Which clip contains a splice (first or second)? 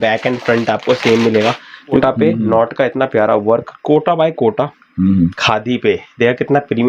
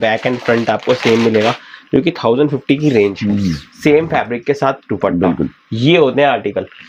first